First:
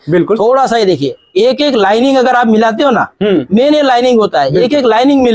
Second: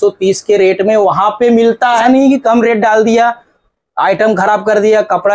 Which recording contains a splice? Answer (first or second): second